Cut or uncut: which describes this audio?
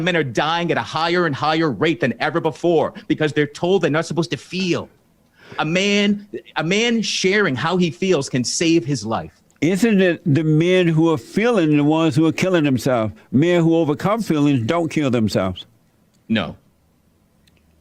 uncut